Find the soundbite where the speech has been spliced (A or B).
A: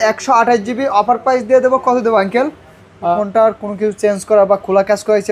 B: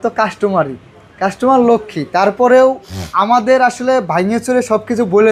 A